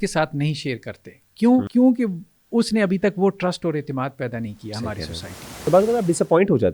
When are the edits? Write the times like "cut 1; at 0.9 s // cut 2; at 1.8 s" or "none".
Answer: cut 1; at 1.7 s // cut 2; at 5.7 s